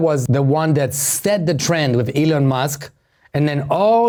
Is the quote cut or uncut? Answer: uncut